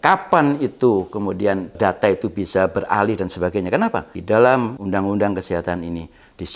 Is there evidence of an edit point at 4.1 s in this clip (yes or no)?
yes